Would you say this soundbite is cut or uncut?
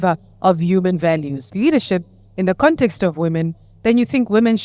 cut